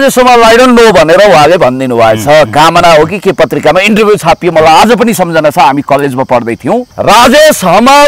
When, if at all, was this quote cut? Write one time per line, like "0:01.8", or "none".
0:06.9

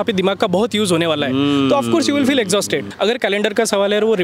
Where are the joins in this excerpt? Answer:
0:02.9

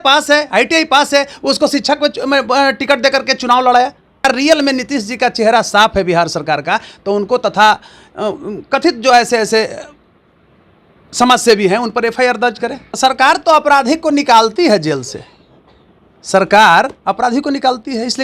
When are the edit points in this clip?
0:04.2
0:12.8

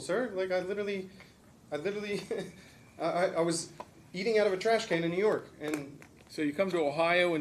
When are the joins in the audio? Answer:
none

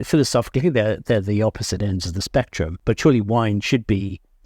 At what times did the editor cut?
0:02.8

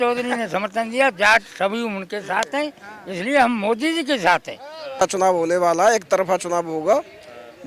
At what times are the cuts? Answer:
0:05.0

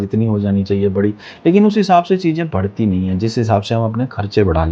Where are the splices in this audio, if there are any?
none

